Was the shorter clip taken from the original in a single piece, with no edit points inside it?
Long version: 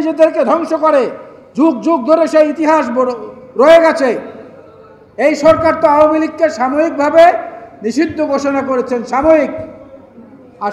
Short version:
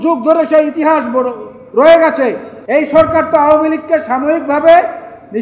no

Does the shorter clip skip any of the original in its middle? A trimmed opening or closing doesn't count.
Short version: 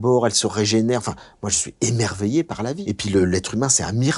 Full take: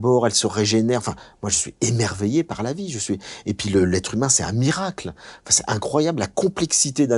yes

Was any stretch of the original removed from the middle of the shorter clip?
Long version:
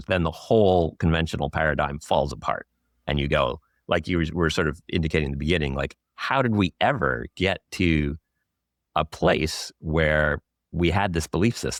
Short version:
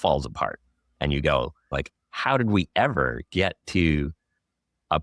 yes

